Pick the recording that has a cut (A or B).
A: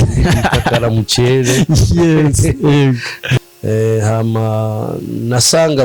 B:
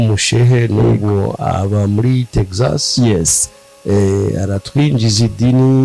A